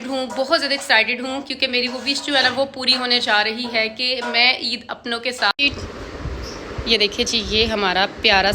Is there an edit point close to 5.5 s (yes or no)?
yes